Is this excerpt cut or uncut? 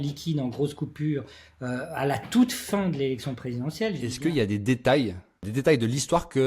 cut